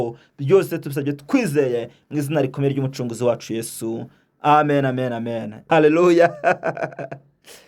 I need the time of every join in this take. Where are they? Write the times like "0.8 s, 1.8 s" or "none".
5.5 s